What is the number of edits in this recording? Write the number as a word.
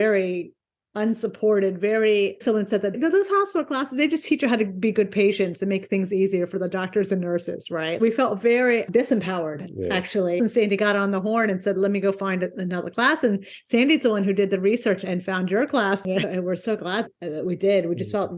four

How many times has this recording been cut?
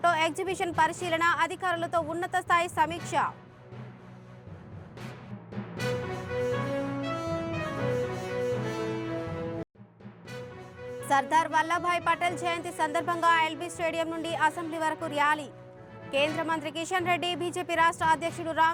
zero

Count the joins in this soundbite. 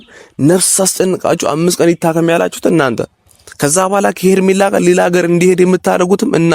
zero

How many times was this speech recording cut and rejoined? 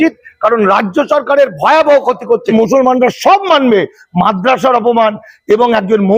one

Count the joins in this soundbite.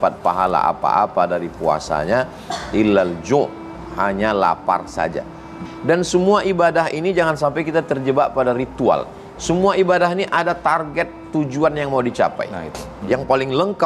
two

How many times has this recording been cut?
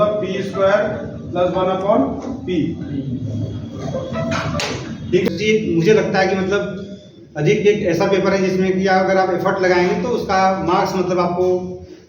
one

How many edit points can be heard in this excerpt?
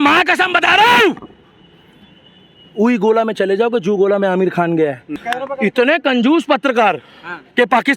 one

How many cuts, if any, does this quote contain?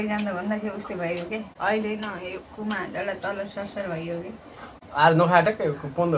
two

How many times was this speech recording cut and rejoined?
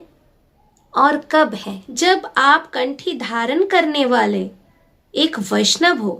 one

